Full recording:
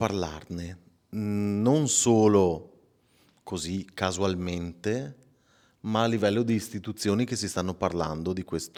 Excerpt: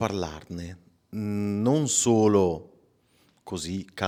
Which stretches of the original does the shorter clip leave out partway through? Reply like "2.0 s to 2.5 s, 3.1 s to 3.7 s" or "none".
none